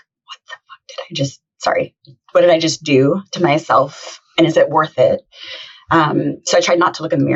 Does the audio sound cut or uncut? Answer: uncut